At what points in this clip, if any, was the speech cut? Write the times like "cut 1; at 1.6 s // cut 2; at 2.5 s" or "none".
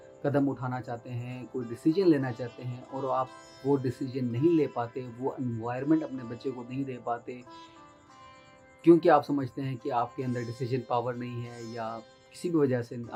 none